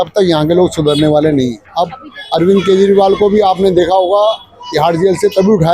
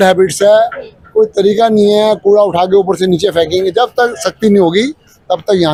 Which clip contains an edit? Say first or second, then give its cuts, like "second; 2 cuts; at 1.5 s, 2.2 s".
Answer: first; 1 cut; at 1.6 s